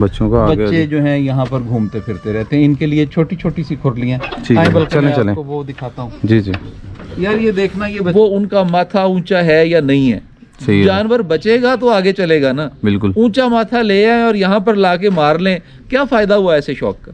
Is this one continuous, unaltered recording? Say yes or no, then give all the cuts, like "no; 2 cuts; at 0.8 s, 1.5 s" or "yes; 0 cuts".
no; 1 cut; at 8.1 s